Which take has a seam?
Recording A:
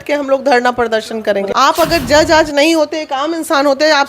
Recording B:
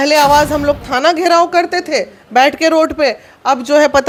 A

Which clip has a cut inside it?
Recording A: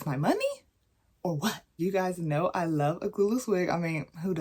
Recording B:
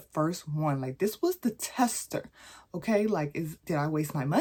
A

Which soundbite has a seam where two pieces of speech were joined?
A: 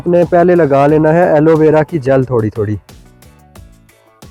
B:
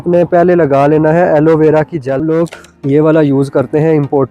B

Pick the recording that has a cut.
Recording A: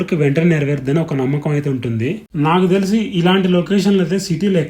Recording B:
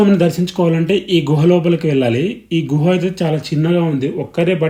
A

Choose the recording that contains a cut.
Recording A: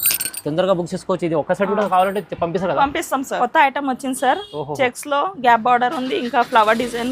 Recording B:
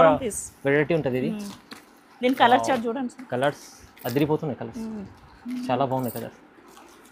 A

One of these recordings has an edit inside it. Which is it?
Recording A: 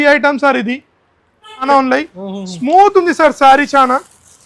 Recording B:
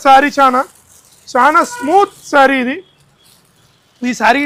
A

